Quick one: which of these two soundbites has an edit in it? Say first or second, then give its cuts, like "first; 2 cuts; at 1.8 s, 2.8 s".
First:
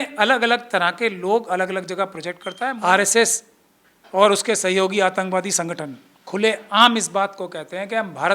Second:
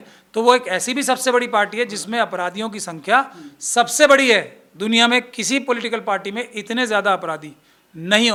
first; 1 cut; at 2.7 s